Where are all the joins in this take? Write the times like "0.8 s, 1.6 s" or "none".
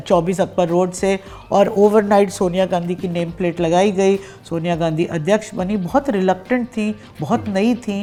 none